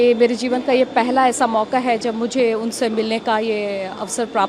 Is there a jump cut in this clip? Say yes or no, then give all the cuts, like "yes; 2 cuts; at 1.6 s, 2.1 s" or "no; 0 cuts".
no; 0 cuts